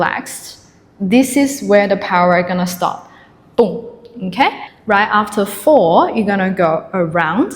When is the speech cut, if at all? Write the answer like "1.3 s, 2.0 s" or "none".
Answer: 4.7 s